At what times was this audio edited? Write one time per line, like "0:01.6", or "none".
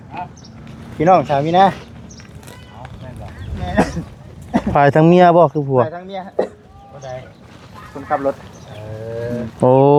none